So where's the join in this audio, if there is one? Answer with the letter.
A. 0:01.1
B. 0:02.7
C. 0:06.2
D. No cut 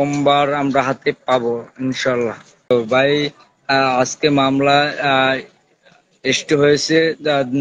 B